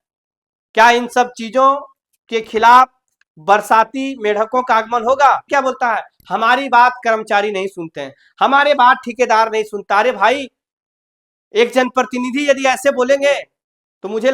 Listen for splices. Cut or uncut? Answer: cut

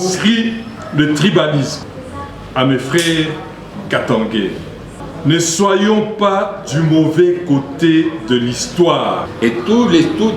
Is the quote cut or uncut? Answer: cut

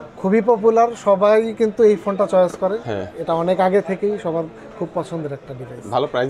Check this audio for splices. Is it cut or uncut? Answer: uncut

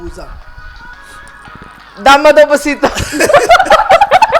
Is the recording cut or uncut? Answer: uncut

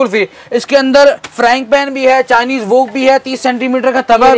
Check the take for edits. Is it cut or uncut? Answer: uncut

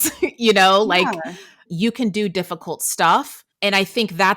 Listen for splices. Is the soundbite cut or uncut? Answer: cut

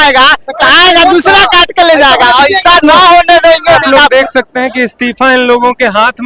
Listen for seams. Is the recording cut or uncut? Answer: cut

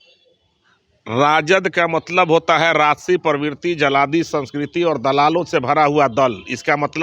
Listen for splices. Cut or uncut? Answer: uncut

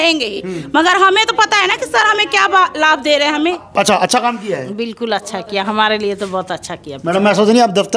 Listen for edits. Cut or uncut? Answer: cut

